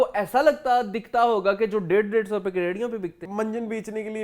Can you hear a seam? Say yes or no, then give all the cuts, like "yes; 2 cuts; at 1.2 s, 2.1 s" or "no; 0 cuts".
yes; 1 cut; at 3.2 s